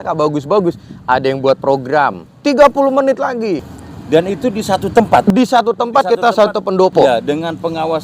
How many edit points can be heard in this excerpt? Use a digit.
2